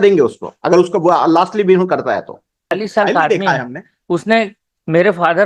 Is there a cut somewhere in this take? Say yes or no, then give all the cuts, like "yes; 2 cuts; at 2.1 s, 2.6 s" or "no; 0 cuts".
yes; 1 cut; at 2.7 s